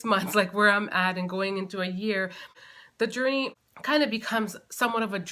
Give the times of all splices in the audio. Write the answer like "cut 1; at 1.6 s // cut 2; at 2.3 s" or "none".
cut 1; at 2.6 s // cut 2; at 3.7 s